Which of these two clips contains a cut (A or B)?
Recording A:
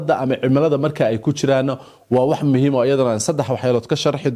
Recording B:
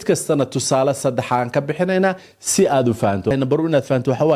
B